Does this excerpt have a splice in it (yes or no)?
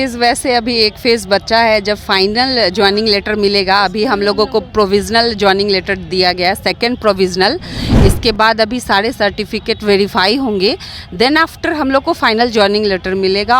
no